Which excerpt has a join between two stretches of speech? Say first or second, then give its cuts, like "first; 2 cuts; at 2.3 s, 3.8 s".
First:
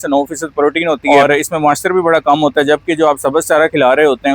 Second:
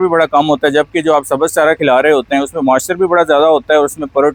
first; 1 cut; at 1.0 s